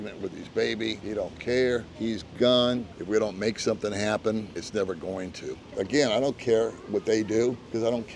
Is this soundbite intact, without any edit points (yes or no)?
no